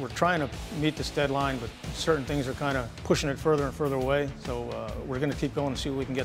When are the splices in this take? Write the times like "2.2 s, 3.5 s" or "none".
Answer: 1.9 s, 2.9 s

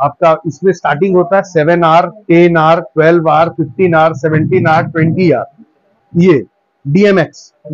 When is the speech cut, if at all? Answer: 5.9 s

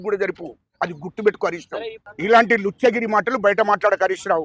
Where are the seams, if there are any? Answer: 2.0 s

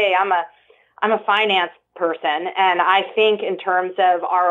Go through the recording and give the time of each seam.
none

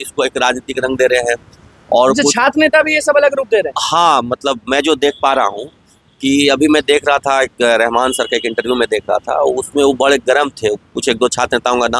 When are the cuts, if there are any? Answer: none

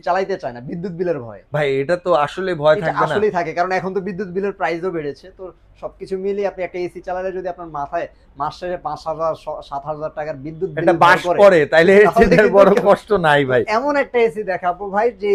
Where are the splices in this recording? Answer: none

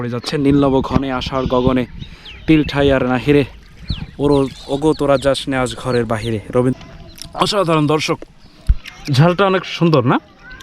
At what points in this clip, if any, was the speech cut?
6.7 s

